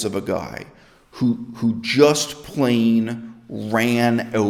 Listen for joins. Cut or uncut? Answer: uncut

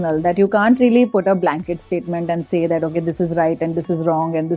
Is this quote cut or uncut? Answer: uncut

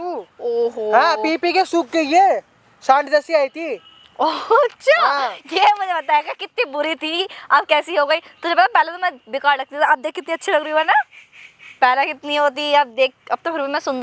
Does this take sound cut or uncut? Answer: uncut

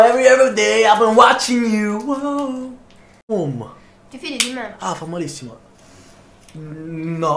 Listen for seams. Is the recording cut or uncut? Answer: cut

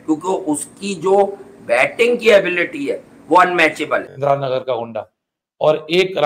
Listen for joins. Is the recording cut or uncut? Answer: cut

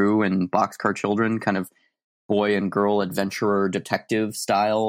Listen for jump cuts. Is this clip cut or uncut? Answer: uncut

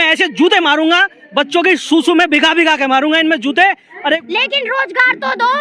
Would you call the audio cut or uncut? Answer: cut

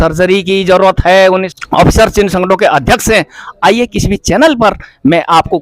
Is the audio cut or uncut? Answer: cut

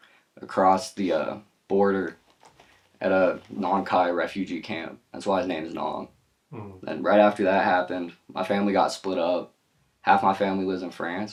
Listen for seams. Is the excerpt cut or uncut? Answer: uncut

